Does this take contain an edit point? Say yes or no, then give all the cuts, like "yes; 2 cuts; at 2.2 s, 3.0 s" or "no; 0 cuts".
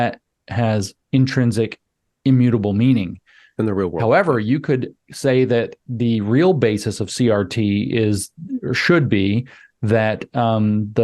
no; 0 cuts